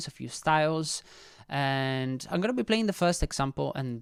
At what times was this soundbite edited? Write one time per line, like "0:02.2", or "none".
none